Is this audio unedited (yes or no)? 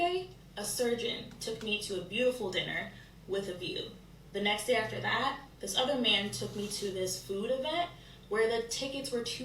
yes